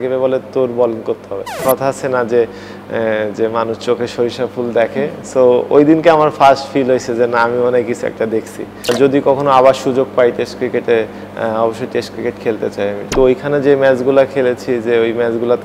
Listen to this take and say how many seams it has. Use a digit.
3